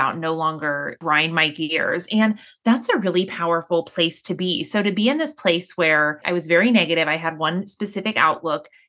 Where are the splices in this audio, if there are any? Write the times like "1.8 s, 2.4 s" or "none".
1.0 s, 6.2 s